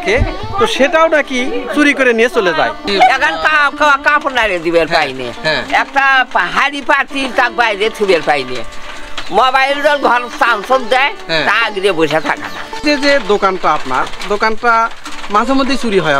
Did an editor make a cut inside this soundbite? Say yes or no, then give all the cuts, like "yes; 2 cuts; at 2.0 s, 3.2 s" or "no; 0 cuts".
yes; 2 cuts; at 2.9 s, 12.8 s